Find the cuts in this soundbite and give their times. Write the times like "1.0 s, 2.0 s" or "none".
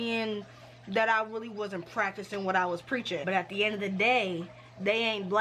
3.2 s